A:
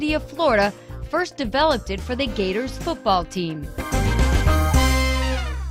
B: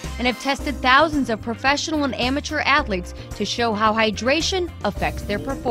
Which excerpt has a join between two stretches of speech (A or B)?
A